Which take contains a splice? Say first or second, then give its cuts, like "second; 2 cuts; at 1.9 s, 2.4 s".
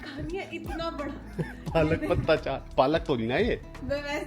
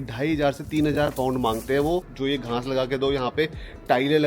second; 1 cut; at 2.1 s